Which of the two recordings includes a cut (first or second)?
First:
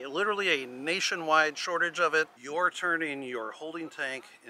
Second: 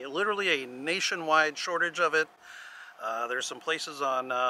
first